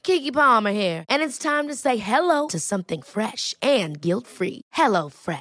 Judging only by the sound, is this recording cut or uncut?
uncut